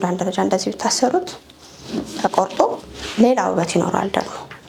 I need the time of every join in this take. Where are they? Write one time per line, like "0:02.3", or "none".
none